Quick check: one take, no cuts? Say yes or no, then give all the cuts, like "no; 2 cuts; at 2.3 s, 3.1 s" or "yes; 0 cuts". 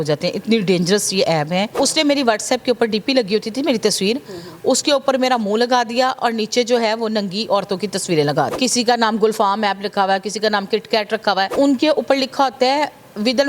no; 3 cuts; at 1.8 s, 8.5 s, 11.5 s